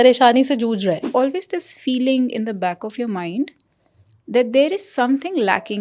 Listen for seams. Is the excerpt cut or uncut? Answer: cut